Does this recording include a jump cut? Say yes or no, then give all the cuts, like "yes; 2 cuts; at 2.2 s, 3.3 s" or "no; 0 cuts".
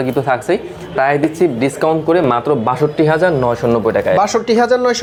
no; 0 cuts